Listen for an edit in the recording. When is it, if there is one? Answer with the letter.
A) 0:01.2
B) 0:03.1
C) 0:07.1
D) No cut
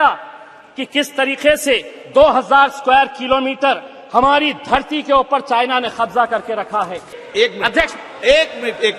C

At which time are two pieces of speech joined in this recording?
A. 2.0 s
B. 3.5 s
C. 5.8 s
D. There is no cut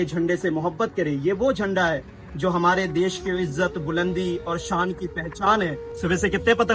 C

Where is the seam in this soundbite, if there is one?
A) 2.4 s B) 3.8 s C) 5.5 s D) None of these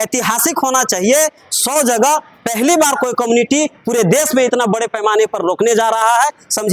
D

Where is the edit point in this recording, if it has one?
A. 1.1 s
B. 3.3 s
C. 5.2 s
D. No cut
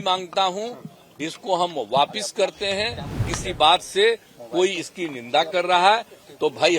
B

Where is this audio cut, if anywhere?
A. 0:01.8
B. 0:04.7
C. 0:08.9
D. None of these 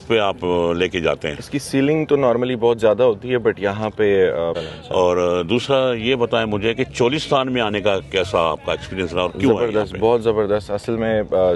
B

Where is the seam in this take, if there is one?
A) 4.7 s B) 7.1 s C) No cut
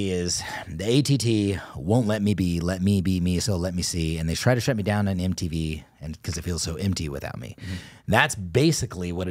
C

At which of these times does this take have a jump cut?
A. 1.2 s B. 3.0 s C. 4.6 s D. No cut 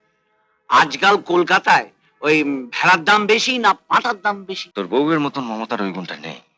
C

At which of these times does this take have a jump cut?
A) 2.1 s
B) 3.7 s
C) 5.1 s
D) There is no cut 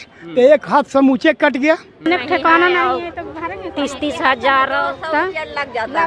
A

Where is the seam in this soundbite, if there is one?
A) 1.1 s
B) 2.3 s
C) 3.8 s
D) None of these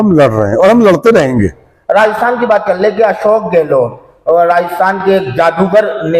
D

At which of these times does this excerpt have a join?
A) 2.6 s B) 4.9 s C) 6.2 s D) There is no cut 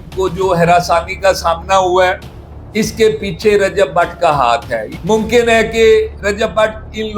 B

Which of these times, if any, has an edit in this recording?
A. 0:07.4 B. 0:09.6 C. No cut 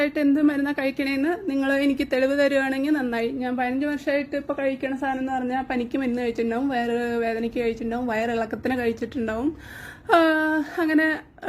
C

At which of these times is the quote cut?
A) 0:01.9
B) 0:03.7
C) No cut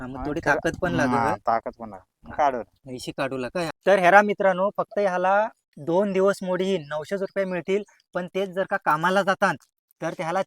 B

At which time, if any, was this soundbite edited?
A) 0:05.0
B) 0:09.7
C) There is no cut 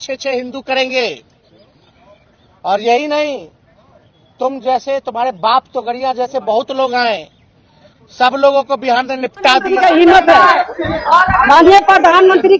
B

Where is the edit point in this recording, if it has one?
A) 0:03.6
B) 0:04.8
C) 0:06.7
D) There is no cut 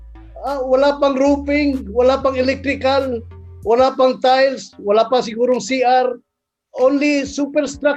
D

